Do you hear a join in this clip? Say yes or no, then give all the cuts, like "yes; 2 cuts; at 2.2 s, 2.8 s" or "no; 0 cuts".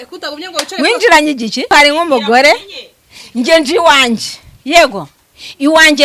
yes; 1 cut; at 1.7 s